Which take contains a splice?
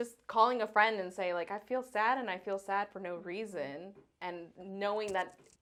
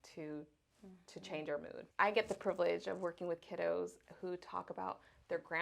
second; 1 cut; at 1.8 s

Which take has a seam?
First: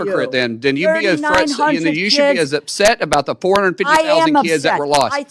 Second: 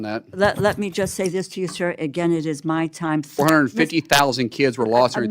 second; 1 cut; at 3.4 s

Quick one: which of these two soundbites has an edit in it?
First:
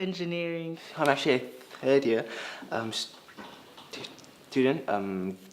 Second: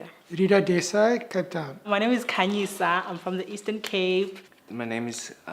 first; 1 cut; at 2.3 s

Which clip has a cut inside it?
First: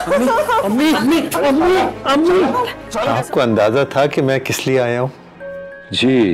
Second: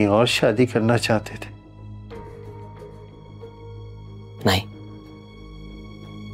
first; 1 cut; at 2.9 s

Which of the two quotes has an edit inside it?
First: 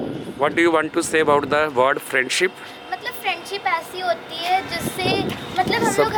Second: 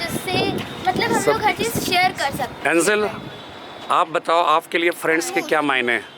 second; 1 cut; at 2.5 s

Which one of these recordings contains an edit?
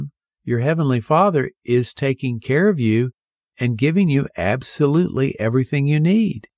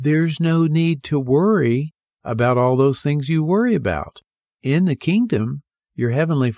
second; 1 cut; at 4.5 s

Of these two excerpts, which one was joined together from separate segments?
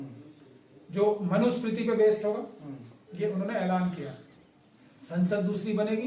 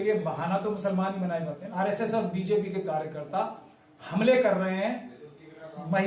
second; 1 cut; at 1.6 s

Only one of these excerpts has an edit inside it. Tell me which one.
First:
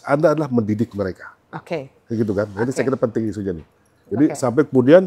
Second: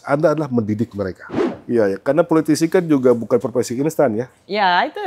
second; 1 cut; at 1.5 s

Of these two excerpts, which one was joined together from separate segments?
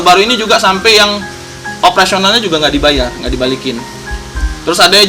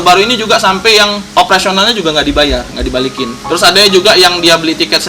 second; 2 cuts; at 1.2 s, 3.4 s

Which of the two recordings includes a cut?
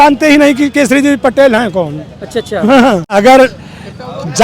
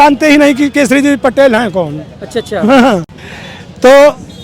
first; 1 cut; at 3.1 s

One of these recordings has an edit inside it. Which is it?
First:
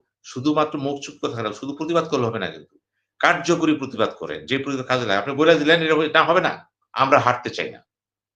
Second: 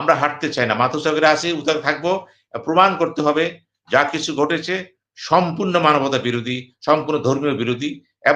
first; 1 cut; at 6.8 s

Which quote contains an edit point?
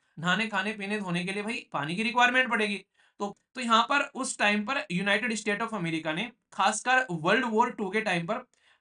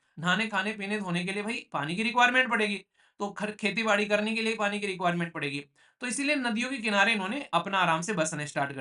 first; 1 cut; at 3.4 s

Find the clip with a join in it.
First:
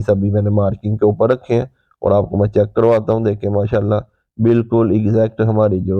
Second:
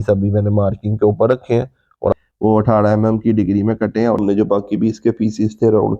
second; 2 cuts; at 2.1 s, 4.2 s

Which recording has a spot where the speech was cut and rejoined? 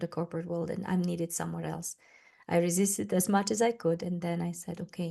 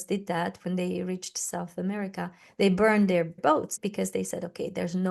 second; 1 cut; at 3.6 s

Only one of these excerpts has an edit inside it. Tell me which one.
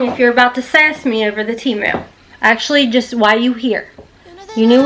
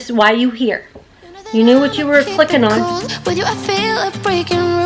second; 1 cut; at 2.8 s

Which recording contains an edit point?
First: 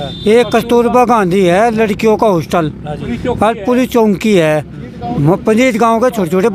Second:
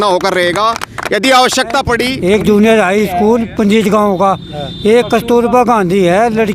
second; 1 cut; at 2.1 s

